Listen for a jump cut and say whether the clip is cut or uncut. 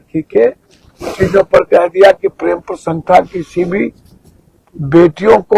uncut